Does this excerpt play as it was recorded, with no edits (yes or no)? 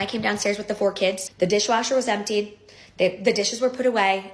no